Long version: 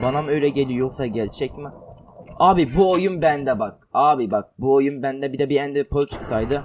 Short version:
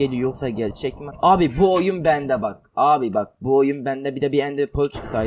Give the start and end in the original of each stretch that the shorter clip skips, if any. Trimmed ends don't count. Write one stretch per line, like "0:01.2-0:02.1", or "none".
0:01.6-0:02.2